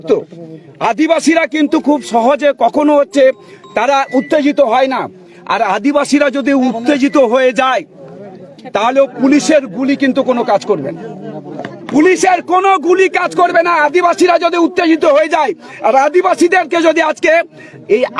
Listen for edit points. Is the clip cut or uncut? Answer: uncut